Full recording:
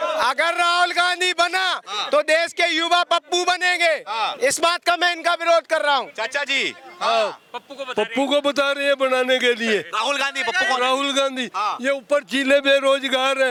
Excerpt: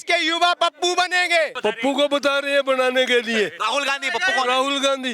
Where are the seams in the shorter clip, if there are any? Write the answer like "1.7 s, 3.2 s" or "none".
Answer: 1.5 s